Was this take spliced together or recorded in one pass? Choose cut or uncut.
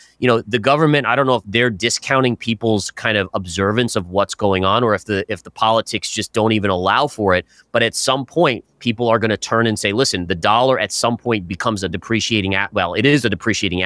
uncut